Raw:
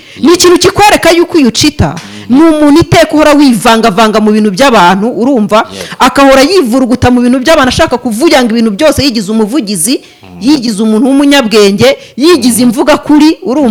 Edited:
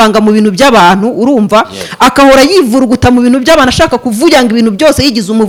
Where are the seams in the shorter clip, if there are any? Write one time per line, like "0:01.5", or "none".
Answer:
none